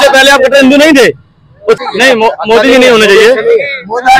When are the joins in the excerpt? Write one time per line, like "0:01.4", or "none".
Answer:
0:01.8

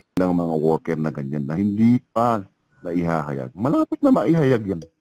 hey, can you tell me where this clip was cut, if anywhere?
none

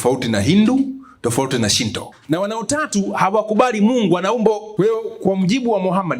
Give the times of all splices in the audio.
0:02.1
0:04.7

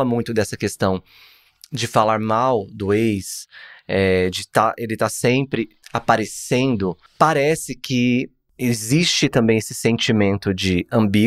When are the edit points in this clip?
0:05.8
0:07.0
0:08.4

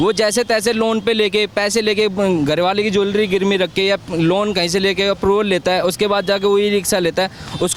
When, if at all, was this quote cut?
none

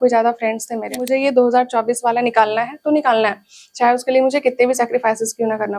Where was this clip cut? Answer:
0:01.0

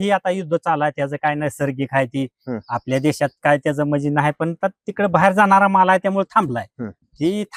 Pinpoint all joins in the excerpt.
none

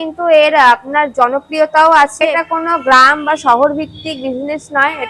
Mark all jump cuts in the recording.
0:02.2

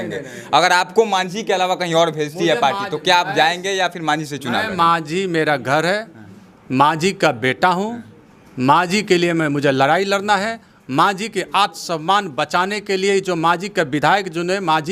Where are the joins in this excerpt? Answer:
none

